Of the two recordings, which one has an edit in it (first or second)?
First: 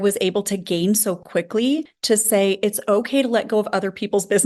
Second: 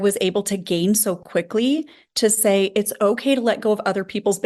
first